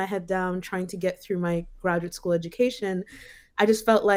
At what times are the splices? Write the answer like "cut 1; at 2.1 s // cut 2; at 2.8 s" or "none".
none